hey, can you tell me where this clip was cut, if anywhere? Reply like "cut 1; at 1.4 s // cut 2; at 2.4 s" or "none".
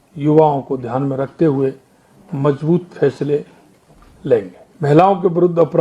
cut 1; at 4.6 s